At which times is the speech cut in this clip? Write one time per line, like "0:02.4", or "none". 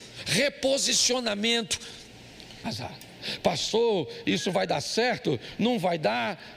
0:02.6